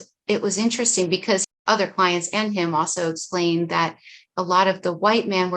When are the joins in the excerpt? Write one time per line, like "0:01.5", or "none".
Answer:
0:01.4